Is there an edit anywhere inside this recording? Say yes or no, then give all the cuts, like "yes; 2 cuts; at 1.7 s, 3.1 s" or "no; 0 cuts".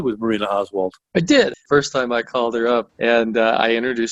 yes; 2 cuts; at 1.6 s, 2.9 s